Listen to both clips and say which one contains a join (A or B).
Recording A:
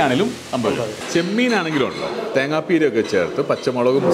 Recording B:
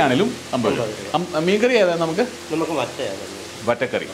A